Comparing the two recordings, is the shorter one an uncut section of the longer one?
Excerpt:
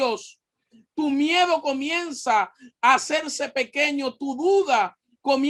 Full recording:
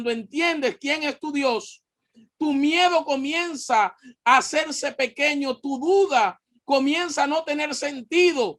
yes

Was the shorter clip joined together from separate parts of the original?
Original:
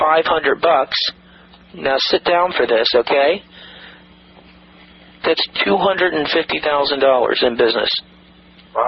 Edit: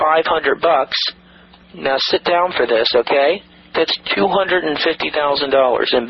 yes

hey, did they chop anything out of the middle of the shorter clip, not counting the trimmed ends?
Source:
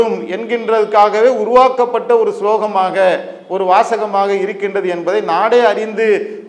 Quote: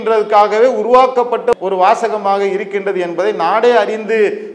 yes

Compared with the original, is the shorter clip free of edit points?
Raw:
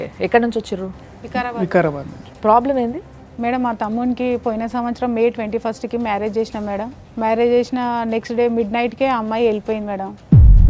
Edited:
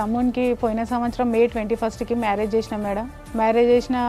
yes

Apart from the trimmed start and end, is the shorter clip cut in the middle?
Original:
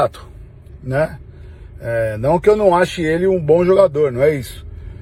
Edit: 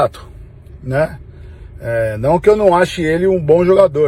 no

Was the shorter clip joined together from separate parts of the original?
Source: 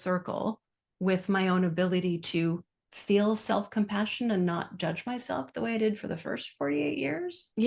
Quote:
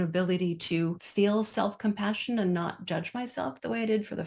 yes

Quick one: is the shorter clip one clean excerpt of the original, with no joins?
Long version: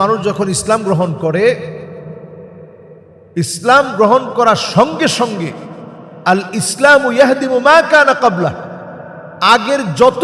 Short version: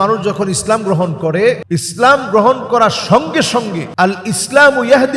no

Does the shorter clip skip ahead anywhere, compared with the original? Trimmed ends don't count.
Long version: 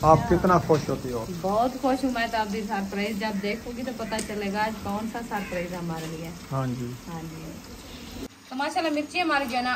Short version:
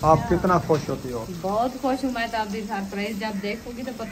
no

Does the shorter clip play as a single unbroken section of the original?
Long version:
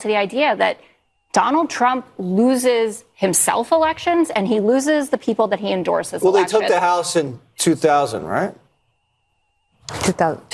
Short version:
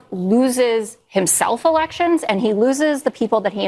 yes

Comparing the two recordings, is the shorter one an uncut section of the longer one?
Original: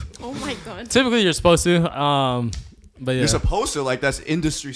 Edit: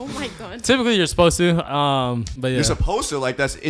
no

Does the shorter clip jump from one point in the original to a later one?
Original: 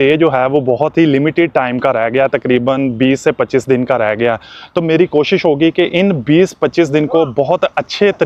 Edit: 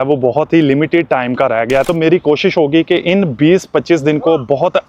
yes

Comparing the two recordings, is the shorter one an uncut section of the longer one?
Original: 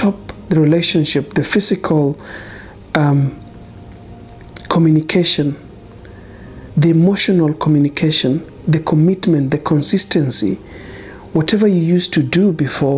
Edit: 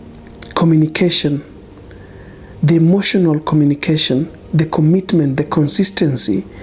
yes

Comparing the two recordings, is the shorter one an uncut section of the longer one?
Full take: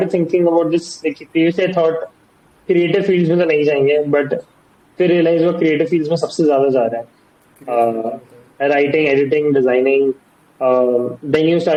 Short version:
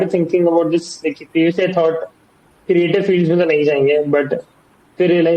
yes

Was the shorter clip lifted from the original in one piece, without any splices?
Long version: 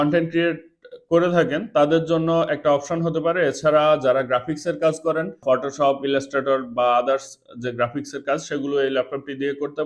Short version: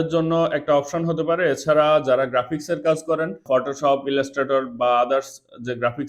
yes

